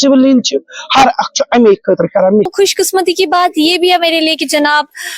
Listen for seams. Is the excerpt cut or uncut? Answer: cut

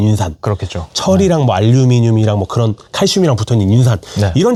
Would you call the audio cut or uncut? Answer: uncut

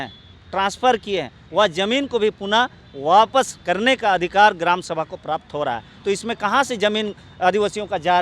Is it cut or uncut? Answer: uncut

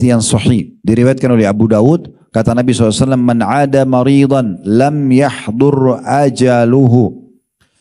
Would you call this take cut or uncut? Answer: uncut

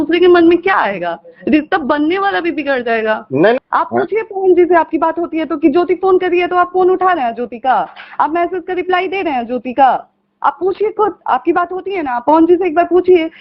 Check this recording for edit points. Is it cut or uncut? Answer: cut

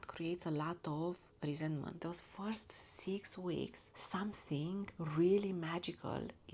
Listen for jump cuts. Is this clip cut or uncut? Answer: cut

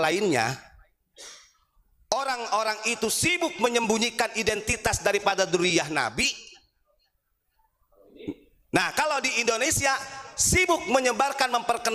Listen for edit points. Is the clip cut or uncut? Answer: uncut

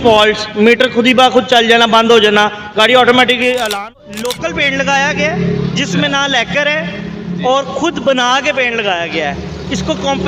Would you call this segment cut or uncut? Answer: cut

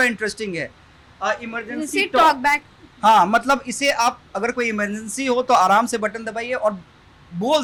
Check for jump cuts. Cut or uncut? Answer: uncut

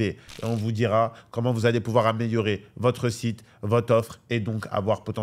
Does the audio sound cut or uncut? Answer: uncut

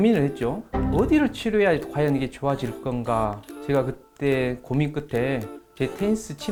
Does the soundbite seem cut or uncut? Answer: uncut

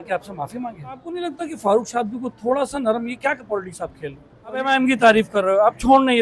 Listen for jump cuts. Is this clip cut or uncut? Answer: cut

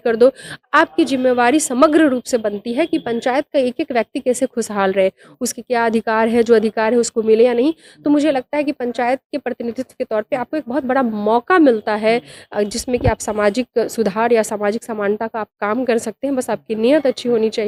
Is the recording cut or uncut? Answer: uncut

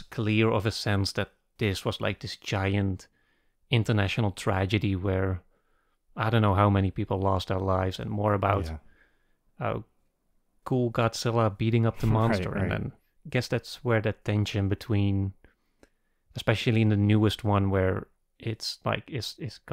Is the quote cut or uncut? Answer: cut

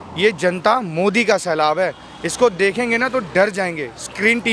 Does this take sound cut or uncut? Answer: uncut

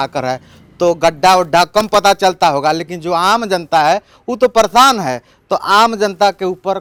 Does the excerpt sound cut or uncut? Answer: uncut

